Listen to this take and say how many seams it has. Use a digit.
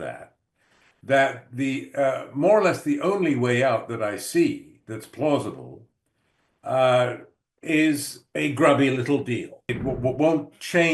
1